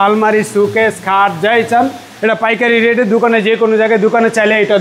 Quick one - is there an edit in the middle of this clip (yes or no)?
no